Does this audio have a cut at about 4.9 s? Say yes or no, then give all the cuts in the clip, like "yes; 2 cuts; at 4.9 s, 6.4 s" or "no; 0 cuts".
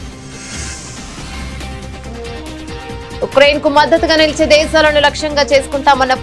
no; 1 cut; at 1.7 s